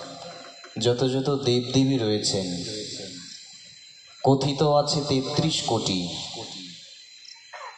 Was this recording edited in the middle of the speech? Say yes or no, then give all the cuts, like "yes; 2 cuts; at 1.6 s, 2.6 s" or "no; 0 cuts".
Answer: no; 0 cuts